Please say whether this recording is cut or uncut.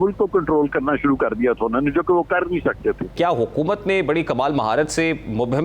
cut